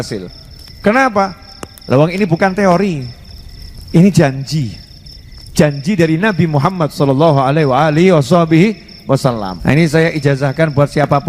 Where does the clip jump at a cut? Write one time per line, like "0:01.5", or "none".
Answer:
0:09.5